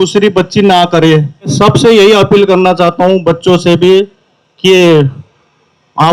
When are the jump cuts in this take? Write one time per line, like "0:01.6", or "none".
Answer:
0:01.5